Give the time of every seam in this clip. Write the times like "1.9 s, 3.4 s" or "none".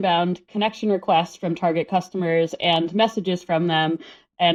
none